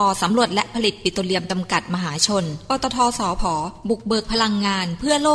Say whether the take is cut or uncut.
uncut